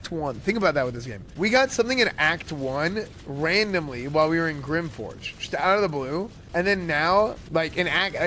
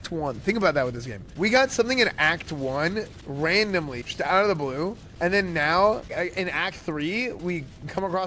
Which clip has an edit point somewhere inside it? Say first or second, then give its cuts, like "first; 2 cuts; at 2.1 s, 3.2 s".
second; 3 cuts; at 4.0 s, 6.1 s, 7.4 s